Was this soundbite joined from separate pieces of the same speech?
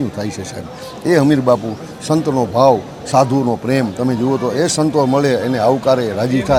no; 0 cuts

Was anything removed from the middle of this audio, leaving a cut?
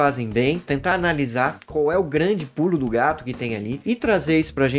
yes; 1 cut; at 0.9 s

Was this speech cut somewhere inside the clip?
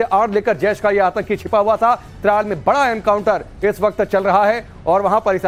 no; 0 cuts

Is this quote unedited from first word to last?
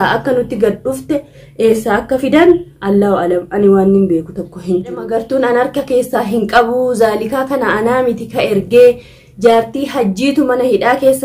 no; 1 cut; at 5.0 s

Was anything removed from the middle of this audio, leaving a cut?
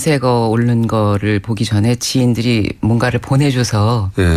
no; 0 cuts

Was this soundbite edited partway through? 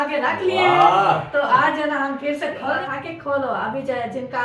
yes; 1 cut; at 2.8 s

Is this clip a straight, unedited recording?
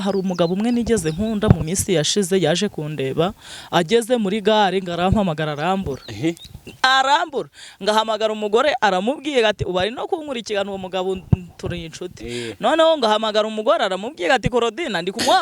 yes; 0 cuts

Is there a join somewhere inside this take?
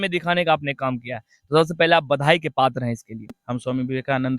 yes; 1 cut; at 3.4 s

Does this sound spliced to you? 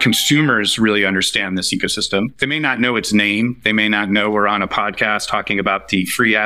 no; 0 cuts

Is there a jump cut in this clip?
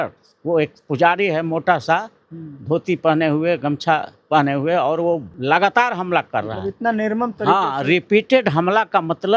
yes; 1 cut; at 5.3 s

